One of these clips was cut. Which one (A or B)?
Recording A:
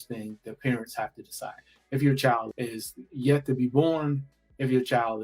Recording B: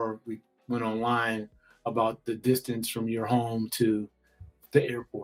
A